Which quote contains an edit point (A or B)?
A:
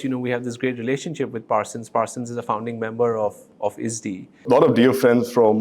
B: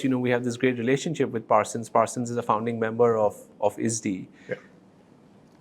A